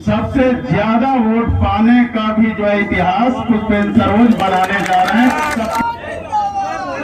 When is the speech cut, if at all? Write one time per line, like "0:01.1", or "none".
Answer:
0:05.7